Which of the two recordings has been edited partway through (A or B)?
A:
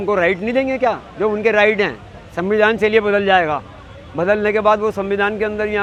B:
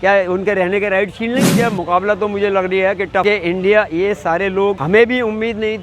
B